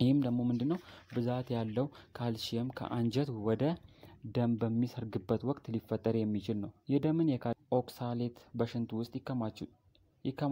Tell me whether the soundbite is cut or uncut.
cut